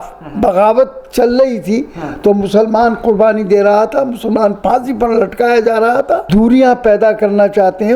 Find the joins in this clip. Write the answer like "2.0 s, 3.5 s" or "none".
6.2 s